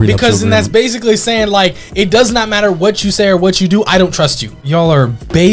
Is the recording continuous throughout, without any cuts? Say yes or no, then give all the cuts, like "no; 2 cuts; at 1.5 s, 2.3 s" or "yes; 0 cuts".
no; 1 cut; at 4.6 s